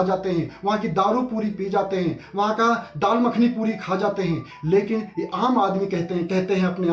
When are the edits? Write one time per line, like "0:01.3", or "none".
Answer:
none